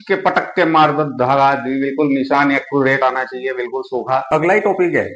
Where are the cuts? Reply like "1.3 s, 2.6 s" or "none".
4.3 s

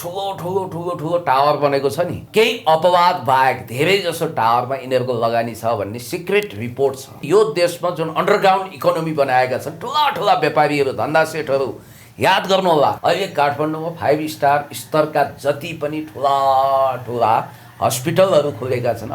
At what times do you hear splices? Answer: 2.2 s, 7.1 s, 13.0 s

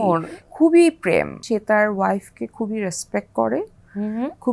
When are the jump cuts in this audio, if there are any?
1.4 s

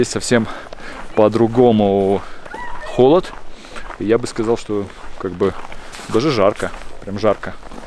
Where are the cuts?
none

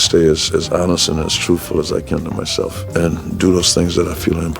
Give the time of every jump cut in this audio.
2.8 s

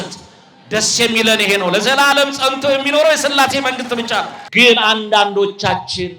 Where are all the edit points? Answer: 4.4 s

